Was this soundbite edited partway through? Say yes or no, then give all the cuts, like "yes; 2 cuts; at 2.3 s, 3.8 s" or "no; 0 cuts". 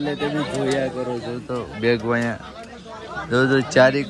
no; 0 cuts